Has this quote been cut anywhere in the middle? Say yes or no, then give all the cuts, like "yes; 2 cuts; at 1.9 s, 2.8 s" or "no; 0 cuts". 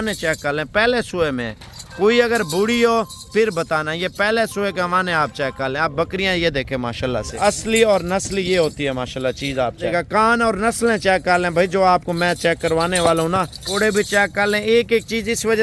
yes; 3 cuts; at 7.3 s, 9.9 s, 13.6 s